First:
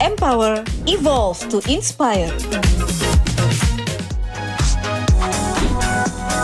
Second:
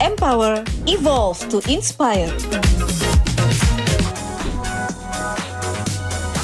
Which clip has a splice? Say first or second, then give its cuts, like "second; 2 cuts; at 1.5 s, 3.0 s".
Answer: second; 1 cut; at 4.1 s